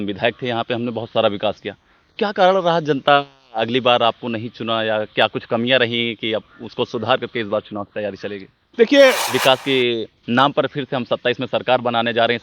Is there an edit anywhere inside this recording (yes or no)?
yes